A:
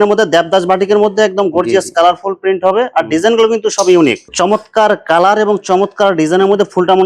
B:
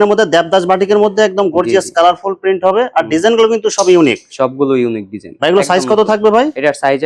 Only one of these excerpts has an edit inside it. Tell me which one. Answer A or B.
A